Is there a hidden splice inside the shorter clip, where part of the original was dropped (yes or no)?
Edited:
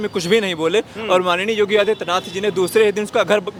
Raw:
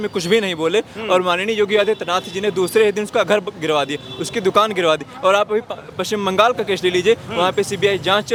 no